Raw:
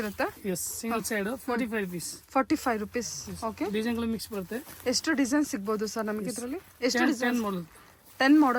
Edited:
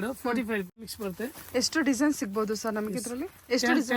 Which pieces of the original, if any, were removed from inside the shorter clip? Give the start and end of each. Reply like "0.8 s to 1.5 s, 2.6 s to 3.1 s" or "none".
2.2 s to 4.3 s